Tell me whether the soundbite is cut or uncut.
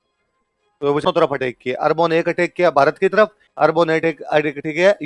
cut